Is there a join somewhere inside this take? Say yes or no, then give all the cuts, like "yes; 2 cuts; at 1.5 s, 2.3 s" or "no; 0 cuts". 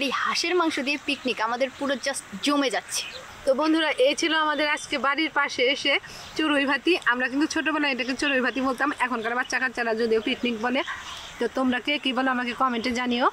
no; 0 cuts